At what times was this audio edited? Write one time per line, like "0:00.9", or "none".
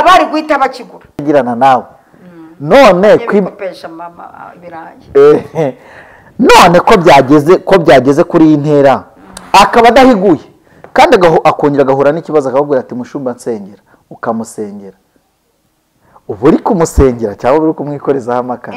0:01.2